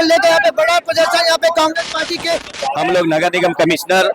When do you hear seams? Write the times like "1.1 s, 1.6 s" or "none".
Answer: 2.5 s